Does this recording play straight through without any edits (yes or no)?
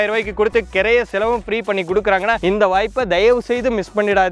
yes